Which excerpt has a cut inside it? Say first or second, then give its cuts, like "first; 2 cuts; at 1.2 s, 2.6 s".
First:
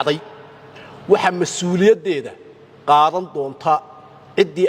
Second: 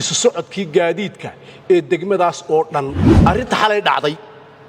second; 1 cut; at 3.0 s